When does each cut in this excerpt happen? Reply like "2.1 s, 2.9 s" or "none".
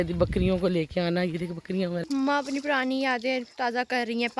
2.0 s